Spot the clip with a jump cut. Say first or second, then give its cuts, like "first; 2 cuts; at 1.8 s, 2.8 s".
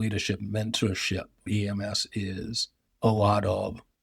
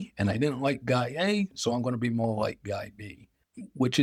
first; 1 cut; at 1.5 s